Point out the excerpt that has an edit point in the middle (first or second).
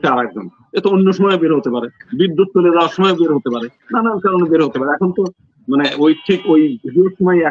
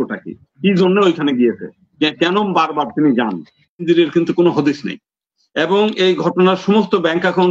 second